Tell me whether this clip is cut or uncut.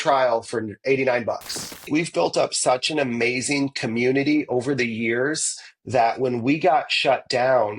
cut